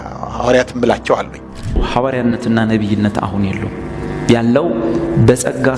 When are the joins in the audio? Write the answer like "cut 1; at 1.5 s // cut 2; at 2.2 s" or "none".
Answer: cut 1; at 1.8 s